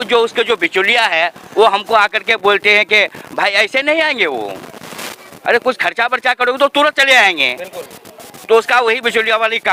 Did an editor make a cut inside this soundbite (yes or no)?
no